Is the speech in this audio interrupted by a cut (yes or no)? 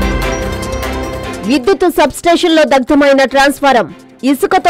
no